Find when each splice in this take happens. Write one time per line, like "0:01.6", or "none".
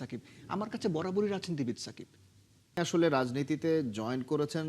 0:02.8